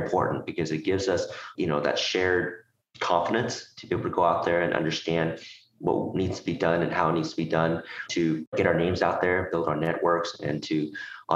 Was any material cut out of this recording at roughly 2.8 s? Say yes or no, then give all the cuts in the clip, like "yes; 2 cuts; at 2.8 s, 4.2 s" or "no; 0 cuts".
no; 2 cuts; at 1.5 s, 8.0 s